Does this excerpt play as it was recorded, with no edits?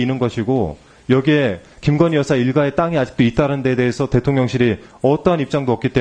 yes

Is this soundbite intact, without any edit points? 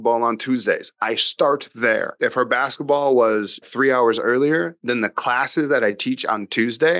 no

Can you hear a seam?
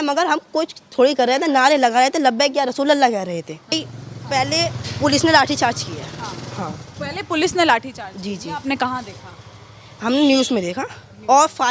yes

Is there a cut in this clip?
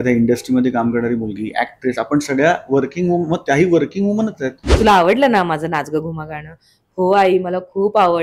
yes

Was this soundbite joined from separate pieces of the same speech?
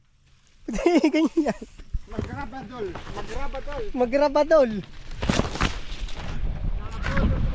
yes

